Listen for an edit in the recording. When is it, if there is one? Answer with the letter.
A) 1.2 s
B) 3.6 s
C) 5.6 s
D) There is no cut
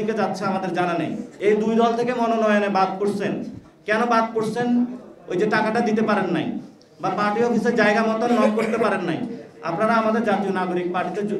A